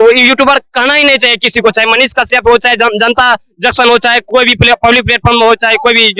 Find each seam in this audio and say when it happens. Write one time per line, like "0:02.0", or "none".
none